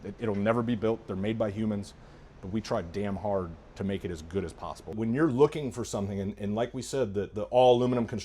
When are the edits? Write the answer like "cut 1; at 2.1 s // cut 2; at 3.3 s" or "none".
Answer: cut 1; at 4.8 s

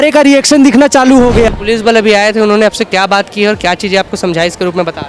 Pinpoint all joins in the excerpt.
cut 1; at 1.5 s

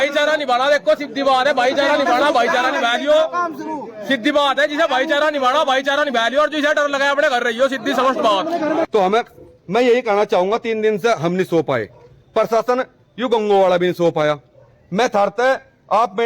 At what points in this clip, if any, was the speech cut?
cut 1; at 8.8 s

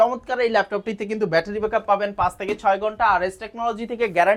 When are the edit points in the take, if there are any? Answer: none

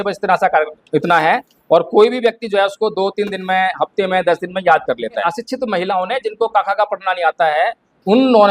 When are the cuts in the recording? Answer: cut 1; at 5.3 s

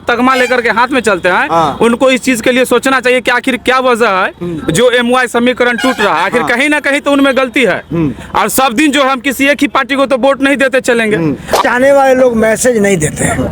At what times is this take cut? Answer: cut 1; at 11.6 s

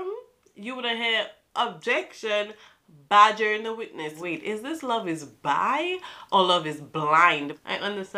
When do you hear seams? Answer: cut 1; at 4.2 s // cut 2; at 7.3 s

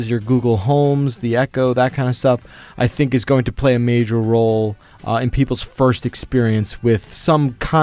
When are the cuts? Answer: none

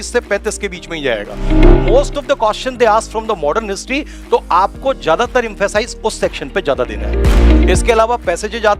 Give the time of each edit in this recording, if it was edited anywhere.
cut 1; at 1.7 s // cut 2; at 7.4 s

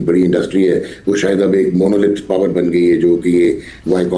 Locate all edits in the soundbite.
none

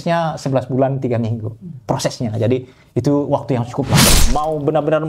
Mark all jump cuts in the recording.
cut 1; at 4.2 s

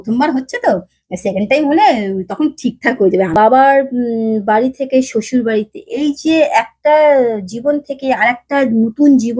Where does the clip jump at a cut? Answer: cut 1; at 3.3 s

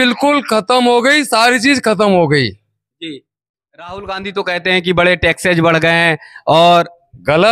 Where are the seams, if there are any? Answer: cut 1; at 3.5 s

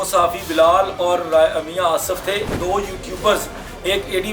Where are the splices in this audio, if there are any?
cut 1; at 2.5 s

